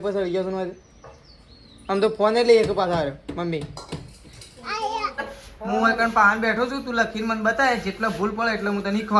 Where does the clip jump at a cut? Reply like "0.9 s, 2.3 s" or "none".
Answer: 5.3 s